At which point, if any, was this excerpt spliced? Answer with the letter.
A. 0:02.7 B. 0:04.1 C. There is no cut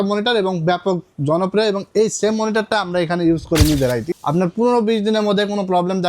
B